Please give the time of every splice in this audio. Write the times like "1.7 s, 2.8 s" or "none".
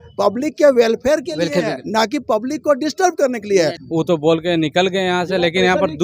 3.8 s